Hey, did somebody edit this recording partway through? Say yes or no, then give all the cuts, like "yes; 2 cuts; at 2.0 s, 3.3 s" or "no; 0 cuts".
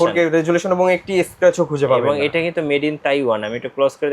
no; 0 cuts